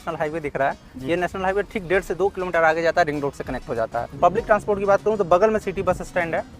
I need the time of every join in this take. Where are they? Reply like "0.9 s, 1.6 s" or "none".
4.0 s